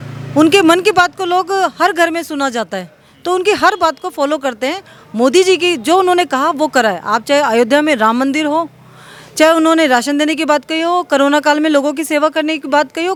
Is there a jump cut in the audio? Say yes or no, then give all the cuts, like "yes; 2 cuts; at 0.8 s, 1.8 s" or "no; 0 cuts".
no; 0 cuts